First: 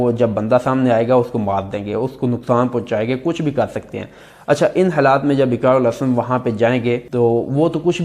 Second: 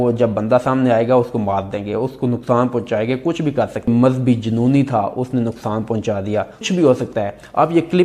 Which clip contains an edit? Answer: second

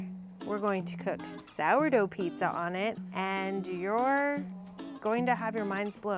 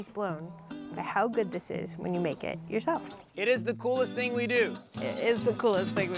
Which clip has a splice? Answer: second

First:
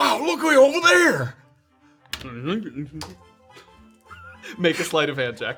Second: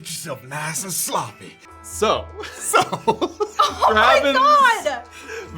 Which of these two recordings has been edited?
second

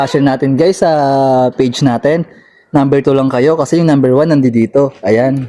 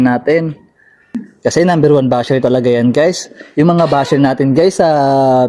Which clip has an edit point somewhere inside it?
second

